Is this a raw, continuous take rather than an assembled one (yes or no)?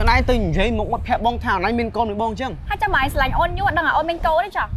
no